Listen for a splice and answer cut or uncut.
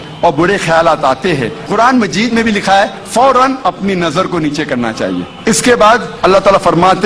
cut